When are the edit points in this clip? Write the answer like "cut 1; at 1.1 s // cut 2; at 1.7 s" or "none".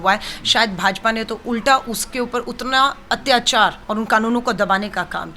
cut 1; at 3.8 s